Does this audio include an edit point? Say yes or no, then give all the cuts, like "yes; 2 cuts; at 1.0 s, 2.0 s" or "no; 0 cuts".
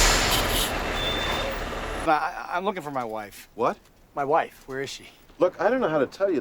yes; 2 cuts; at 1.9 s, 5.2 s